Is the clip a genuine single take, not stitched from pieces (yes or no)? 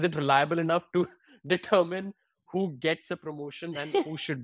yes